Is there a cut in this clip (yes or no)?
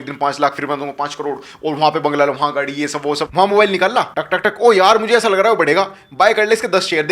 yes